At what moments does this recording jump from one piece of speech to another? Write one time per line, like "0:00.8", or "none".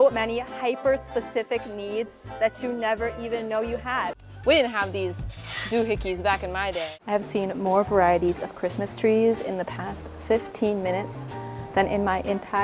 0:04.2
0:06.8